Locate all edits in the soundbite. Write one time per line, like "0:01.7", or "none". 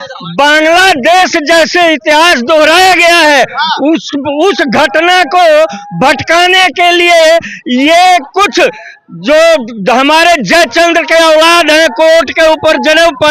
none